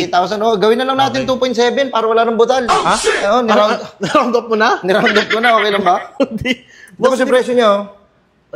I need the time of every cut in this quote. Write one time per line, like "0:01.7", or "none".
none